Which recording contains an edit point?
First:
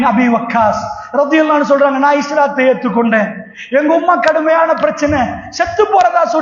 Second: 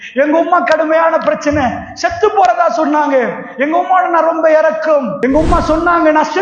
second; 1 cut; at 5.1 s

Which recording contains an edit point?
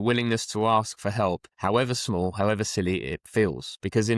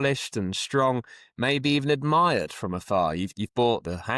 first; 1 cut; at 1.5 s

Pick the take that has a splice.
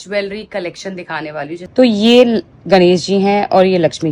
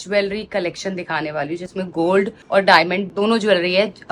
first; 1 cut; at 1.6 s

